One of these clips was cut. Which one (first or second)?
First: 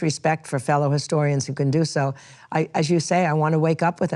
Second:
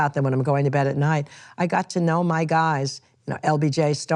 second